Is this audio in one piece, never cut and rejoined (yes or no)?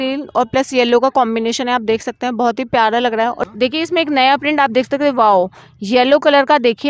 no